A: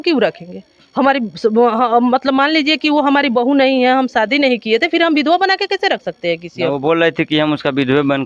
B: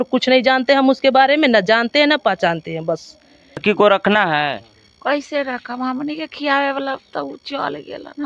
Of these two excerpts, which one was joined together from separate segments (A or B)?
B